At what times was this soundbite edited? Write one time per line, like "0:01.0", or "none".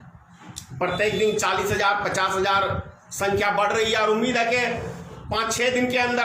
0:05.1